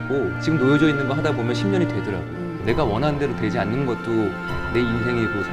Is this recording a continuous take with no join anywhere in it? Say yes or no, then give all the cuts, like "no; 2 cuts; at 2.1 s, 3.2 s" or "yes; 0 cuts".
yes; 0 cuts